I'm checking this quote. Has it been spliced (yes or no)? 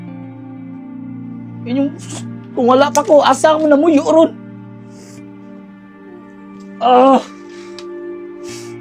no